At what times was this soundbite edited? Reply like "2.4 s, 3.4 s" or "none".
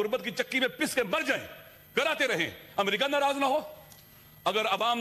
none